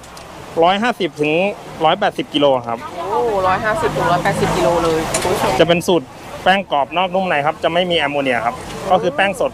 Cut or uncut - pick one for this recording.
cut